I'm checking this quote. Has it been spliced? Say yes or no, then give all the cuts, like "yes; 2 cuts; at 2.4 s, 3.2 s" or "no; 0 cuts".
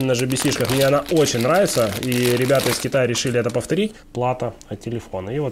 yes; 1 cut; at 4.0 s